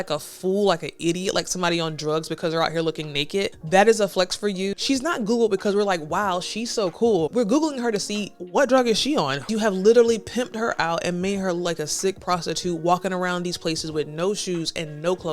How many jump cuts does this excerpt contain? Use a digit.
4